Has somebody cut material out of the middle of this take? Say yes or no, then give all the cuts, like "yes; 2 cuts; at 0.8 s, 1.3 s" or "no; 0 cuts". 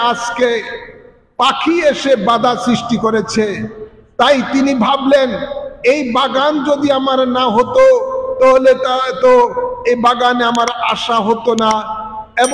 no; 0 cuts